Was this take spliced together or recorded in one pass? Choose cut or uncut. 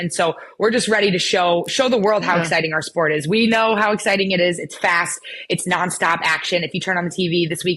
uncut